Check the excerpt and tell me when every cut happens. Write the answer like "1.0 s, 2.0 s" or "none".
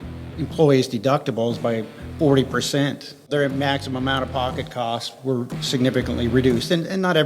3.3 s